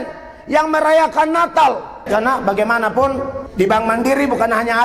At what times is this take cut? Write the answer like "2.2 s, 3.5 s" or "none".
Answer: 2.0 s, 3.4 s